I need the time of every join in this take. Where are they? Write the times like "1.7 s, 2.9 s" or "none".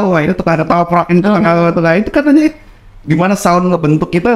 none